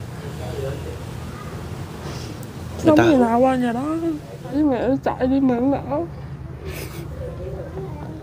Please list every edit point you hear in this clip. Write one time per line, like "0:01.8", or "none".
0:04.5